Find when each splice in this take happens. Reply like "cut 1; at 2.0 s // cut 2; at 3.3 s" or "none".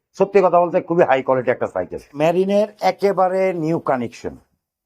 cut 1; at 2.1 s